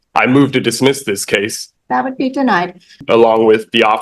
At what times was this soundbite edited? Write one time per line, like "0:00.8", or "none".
0:01.6
0:03.0